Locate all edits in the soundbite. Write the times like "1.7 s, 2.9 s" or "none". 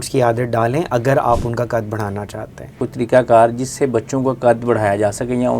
2.9 s